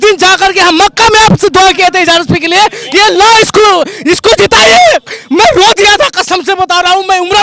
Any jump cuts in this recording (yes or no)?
no